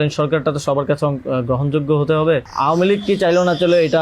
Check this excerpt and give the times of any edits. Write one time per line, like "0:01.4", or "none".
0:02.5